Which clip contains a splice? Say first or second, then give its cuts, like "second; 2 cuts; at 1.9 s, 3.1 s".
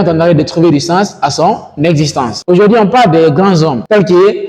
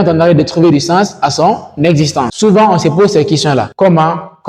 second; 1 cut; at 2.3 s